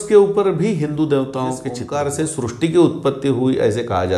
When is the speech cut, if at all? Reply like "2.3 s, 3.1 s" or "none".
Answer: 1.8 s